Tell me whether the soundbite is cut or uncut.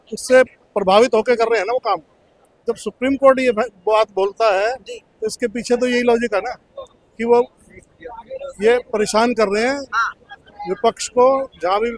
uncut